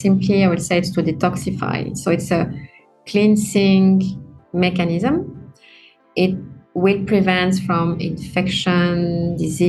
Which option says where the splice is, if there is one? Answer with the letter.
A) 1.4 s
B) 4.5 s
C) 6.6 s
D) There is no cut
D